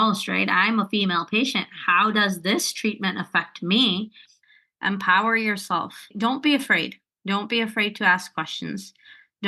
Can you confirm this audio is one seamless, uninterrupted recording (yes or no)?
no